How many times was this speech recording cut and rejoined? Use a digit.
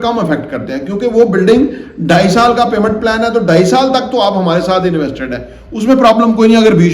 0